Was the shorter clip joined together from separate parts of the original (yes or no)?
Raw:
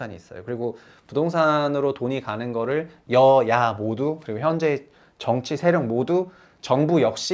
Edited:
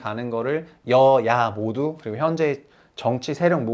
no